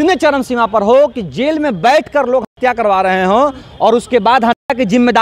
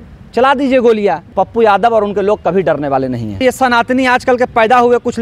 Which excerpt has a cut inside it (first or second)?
second